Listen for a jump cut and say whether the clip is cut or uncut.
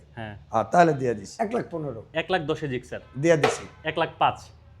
cut